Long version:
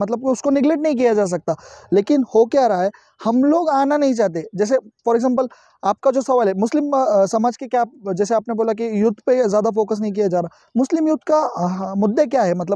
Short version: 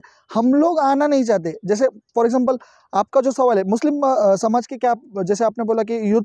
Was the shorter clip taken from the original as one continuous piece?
yes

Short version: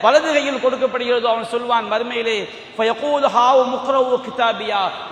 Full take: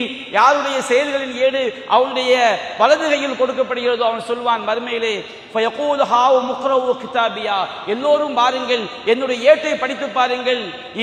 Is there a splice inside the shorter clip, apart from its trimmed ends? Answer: no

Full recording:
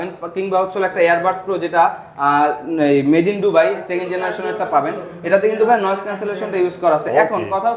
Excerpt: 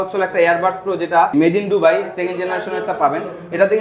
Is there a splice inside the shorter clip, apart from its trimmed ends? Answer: yes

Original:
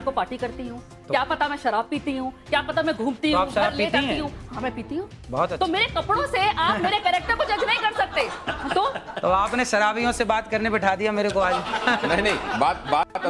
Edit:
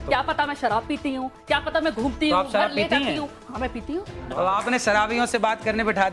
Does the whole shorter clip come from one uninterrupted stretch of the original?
no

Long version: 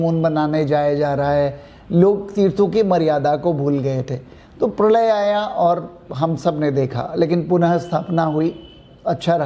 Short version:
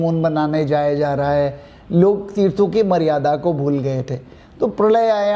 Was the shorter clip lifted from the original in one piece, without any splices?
yes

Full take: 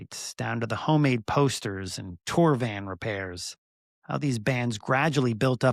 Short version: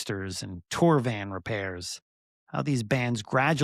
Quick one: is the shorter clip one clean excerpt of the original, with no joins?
yes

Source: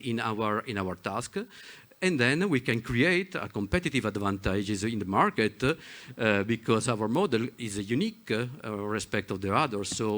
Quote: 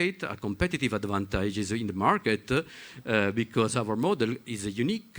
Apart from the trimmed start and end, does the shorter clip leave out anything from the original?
no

